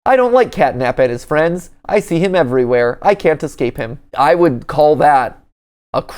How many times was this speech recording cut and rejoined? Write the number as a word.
one